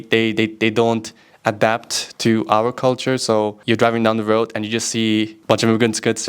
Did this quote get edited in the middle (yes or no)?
yes